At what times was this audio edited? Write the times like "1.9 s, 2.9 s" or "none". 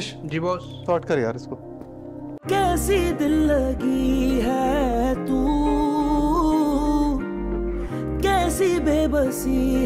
2.3 s